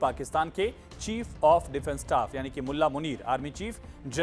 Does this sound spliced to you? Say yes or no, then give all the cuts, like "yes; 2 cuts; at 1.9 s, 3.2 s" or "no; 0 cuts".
no; 0 cuts